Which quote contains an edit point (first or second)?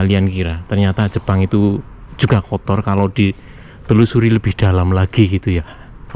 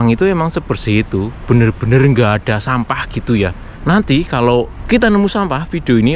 second